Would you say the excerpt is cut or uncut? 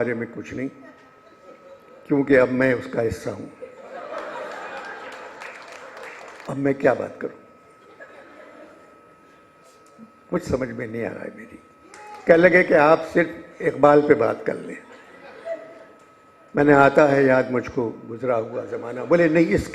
cut